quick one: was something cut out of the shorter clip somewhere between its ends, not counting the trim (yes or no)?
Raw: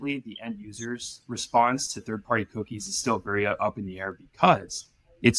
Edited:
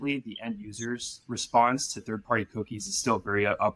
no